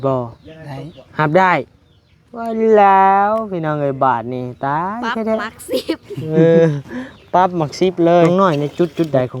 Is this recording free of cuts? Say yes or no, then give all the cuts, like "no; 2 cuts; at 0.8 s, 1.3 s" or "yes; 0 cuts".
no; 1 cut; at 8.3 s